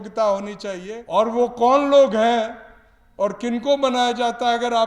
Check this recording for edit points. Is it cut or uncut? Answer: cut